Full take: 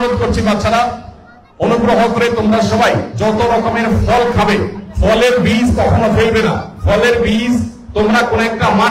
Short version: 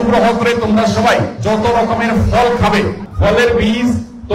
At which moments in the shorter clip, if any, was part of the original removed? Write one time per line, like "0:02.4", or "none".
0:03.1